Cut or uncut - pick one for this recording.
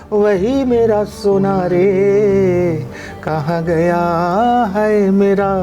uncut